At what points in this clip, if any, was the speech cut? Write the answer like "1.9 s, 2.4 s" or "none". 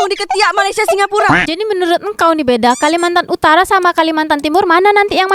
1.4 s